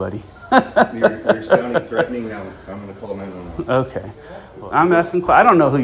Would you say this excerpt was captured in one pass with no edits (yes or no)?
no